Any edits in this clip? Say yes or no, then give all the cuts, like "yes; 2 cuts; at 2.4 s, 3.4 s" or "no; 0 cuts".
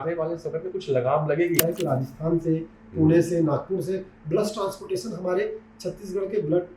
yes; 1 cut; at 1.6 s